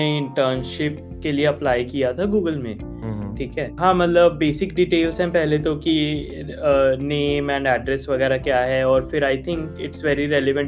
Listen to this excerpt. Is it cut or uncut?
uncut